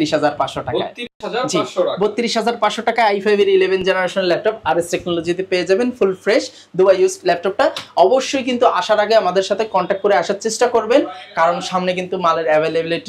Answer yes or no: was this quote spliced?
no